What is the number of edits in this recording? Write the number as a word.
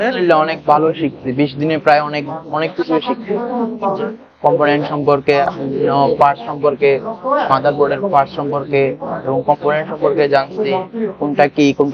zero